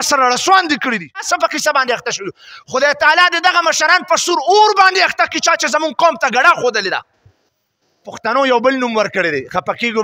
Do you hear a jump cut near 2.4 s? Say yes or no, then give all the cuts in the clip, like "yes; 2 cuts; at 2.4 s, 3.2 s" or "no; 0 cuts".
no; 2 cuts; at 1.0 s, 8.3 s